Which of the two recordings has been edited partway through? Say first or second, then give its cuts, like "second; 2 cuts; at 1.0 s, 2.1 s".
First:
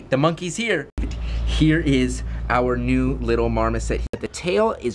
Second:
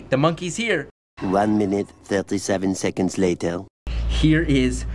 first; 2 cuts; at 1.1 s, 4.1 s